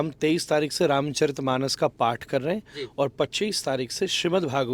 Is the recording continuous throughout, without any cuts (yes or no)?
yes